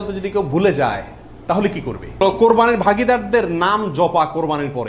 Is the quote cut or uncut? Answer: cut